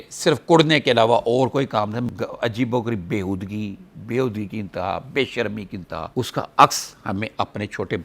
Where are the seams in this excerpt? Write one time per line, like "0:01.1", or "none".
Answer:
0:02.1
0:06.1